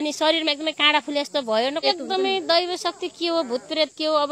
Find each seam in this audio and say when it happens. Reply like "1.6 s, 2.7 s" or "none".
1.8 s